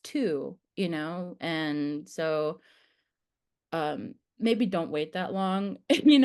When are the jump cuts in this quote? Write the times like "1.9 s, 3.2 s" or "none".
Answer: none